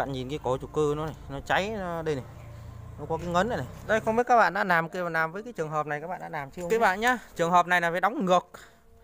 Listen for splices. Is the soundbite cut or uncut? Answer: cut